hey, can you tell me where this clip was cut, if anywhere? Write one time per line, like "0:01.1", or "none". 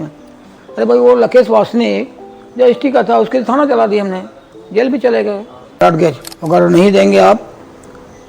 0:05.8